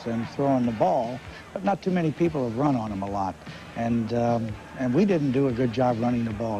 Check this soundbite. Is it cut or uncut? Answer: uncut